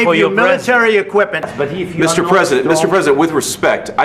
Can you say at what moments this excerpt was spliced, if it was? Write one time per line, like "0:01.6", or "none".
0:01.5